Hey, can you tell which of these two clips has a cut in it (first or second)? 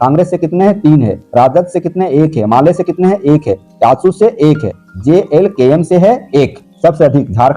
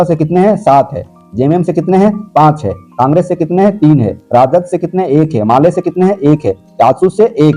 first